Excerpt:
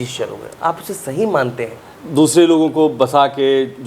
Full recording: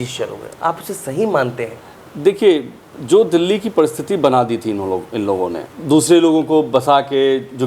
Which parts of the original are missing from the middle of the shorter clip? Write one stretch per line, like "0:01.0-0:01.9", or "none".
0:01.9-0:05.7